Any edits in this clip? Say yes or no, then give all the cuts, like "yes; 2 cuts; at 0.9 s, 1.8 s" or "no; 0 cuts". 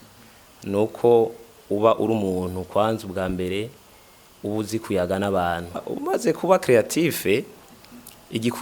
yes; 1 cut; at 5.9 s